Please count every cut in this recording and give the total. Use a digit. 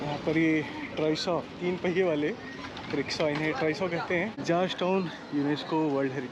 1